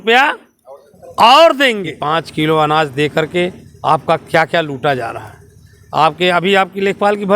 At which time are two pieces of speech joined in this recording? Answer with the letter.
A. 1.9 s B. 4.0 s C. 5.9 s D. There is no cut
A